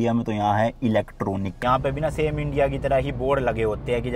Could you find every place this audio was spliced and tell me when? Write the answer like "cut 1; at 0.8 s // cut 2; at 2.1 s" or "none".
cut 1; at 1.6 s